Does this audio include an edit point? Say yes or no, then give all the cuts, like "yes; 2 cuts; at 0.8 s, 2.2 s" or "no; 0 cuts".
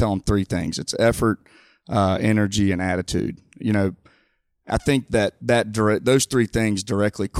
no; 0 cuts